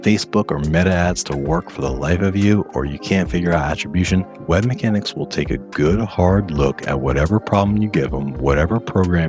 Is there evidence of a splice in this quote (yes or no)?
no